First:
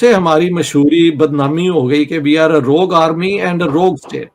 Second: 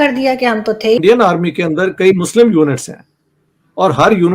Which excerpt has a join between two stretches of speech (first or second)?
second